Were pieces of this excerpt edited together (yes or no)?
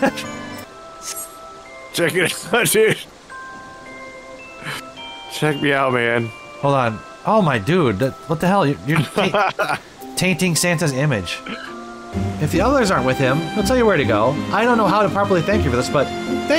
yes